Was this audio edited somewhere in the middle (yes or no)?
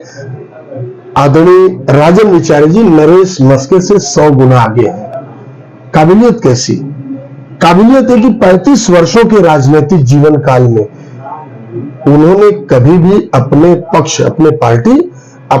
no